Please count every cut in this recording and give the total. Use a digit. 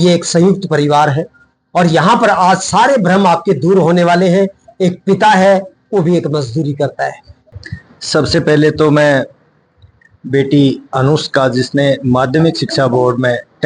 1